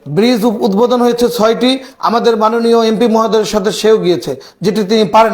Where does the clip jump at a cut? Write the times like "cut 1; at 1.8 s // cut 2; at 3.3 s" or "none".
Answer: none